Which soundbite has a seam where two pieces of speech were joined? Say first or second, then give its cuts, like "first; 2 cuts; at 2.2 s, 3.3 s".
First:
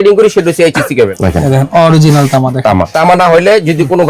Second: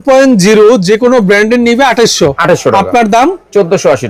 first; 2 cuts; at 1.2 s, 2.9 s